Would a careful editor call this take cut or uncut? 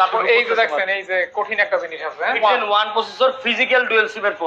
cut